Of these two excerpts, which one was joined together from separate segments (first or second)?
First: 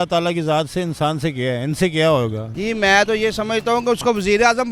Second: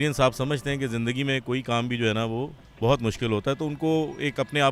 first